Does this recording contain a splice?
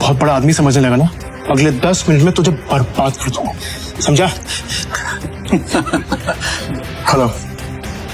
yes; 2 cuts; at 1.3 s, 6.5 s

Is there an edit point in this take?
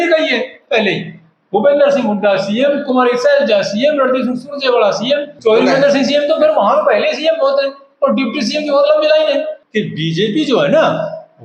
yes; 2 cuts; at 5.3 s, 9.6 s

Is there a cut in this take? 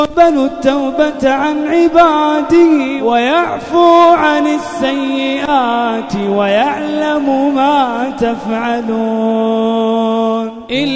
yes; 1 cut; at 2.9 s

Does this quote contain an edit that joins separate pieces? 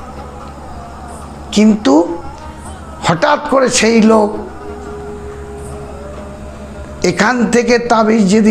no; 0 cuts

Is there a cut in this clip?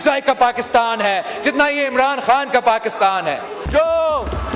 yes; 1 cut; at 3.6 s

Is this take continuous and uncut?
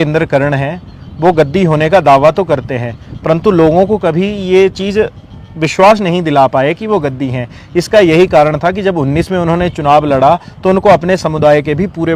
yes; 0 cuts

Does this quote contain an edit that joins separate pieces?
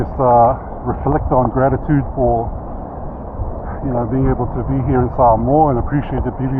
no; 0 cuts

